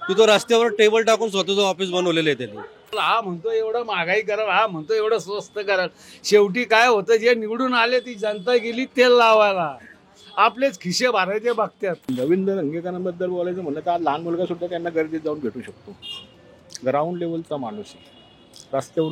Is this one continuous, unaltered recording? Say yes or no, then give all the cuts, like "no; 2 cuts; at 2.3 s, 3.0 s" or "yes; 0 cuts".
no; 2 cuts; at 3.0 s, 12.1 s